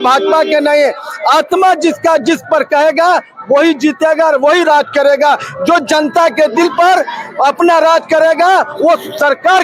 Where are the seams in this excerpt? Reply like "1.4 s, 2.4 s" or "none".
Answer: none